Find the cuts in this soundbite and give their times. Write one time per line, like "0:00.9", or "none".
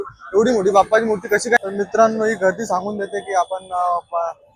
0:01.6